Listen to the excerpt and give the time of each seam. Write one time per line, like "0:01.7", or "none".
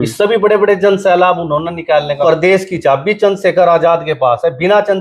0:02.2